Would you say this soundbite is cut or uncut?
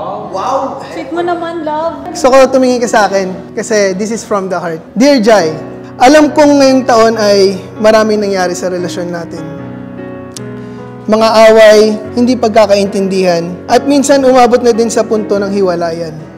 cut